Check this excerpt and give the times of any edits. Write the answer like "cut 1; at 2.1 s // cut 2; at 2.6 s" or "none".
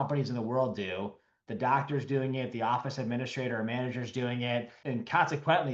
cut 1; at 4.7 s

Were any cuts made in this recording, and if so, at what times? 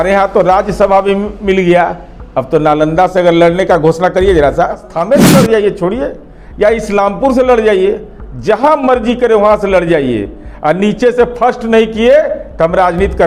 cut 1; at 4.9 s

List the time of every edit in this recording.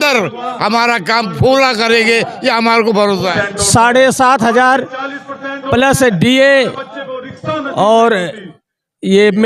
cut 1; at 3.4 s

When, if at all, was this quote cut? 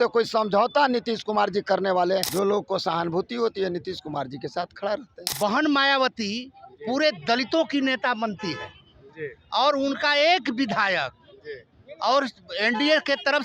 cut 1; at 2.3 s // cut 2; at 5.2 s

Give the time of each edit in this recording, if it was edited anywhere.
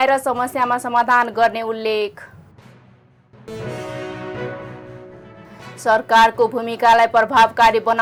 none

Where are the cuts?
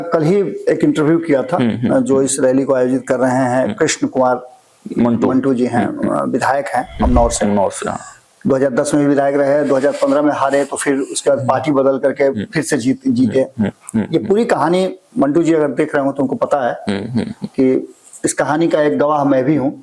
none

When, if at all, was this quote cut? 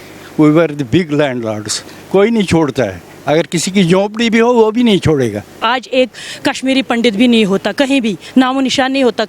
cut 1; at 5.6 s

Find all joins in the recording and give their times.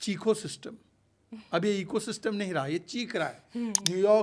none

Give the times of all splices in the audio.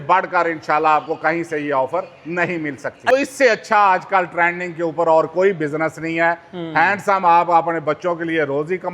cut 1; at 3.1 s

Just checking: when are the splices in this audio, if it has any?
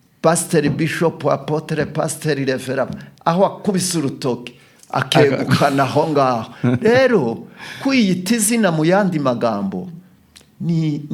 none

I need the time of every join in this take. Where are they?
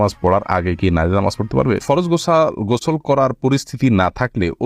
cut 1; at 1.8 s

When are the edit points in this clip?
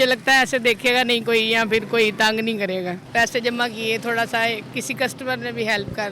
cut 1; at 3.0 s // cut 2; at 4.7 s

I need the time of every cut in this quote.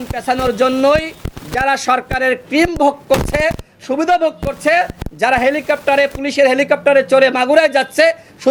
none

